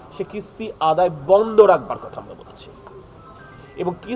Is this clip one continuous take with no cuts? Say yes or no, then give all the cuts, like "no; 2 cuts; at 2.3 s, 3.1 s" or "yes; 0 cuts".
yes; 0 cuts